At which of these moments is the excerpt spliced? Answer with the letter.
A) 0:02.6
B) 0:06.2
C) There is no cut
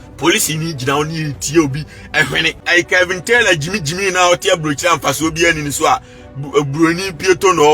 A